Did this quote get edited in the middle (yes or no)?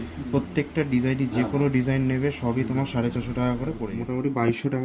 yes